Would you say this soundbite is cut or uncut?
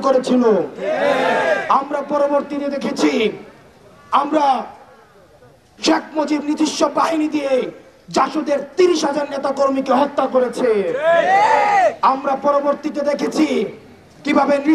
uncut